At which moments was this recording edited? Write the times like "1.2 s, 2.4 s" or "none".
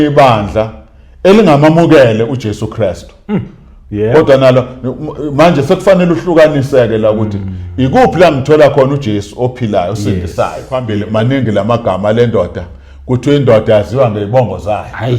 11.0 s